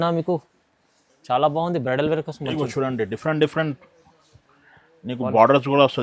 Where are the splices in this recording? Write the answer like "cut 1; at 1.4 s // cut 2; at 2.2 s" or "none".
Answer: none